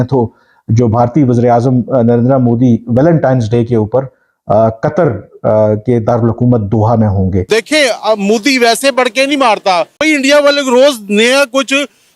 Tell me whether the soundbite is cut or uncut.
cut